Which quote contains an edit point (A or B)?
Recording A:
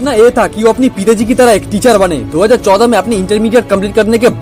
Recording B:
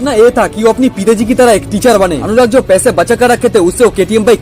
B